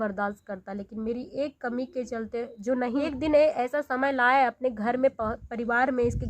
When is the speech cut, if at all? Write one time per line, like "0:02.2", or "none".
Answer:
0:03.0